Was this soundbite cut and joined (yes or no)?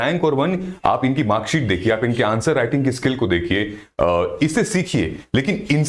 no